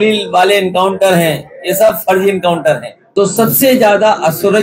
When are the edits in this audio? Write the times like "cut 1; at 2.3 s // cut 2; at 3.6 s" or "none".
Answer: cut 1; at 2.9 s